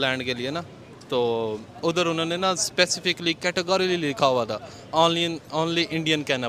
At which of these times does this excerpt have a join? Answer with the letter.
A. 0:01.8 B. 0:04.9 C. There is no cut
C